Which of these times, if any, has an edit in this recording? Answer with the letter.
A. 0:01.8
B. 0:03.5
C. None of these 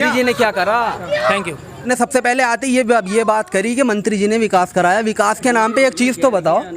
A